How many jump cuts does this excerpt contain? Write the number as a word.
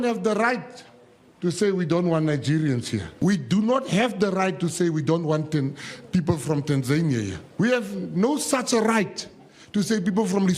two